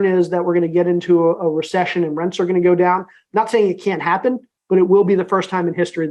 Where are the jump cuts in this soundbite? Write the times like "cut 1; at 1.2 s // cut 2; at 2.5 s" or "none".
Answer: none